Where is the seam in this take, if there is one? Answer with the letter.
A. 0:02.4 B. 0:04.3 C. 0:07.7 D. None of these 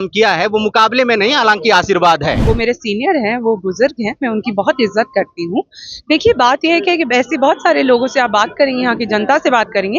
A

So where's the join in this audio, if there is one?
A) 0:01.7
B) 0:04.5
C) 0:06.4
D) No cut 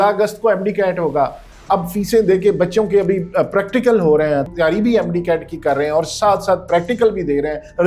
B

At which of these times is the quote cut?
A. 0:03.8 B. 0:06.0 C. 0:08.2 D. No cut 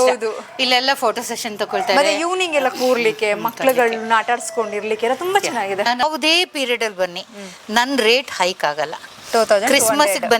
B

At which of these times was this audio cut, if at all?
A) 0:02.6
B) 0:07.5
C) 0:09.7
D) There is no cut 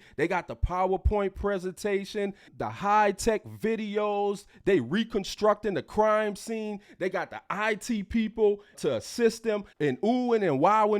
C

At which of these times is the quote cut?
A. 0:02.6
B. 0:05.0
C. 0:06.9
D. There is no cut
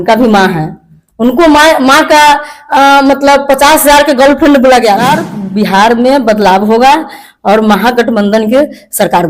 B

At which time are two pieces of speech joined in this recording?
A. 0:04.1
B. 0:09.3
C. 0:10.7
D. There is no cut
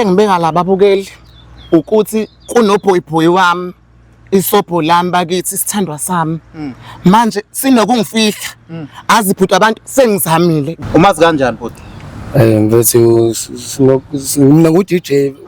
C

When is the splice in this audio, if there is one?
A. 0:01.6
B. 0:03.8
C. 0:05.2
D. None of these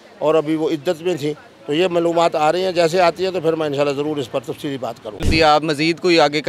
C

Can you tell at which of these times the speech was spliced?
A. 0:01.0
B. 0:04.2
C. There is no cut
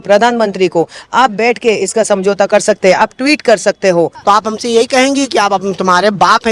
B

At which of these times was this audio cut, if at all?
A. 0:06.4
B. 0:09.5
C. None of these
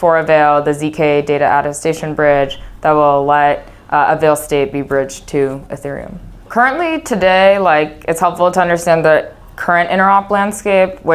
A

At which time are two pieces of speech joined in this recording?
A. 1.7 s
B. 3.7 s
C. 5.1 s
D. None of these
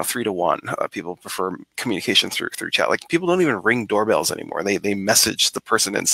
A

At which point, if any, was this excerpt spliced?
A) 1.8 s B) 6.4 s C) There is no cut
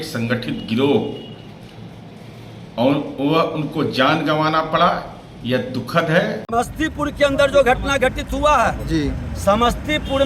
B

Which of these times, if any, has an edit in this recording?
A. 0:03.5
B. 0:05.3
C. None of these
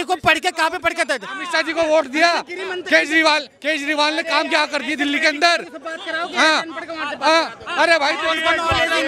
C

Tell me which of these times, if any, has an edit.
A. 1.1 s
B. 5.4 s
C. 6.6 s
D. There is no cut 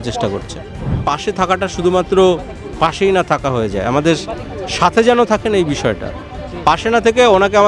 A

